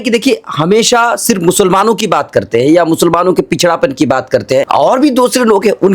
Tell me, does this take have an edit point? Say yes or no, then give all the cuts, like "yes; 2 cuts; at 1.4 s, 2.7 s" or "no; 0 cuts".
yes; 1 cut; at 4.7 s